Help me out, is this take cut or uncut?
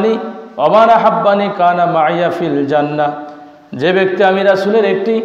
uncut